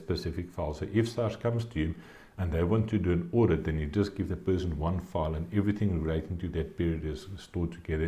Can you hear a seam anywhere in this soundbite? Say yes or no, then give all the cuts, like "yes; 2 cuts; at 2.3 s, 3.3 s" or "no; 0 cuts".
no; 0 cuts